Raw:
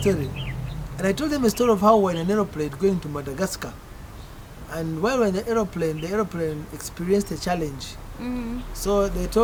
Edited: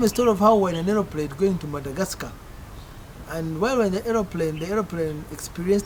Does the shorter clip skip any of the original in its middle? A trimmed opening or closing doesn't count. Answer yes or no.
no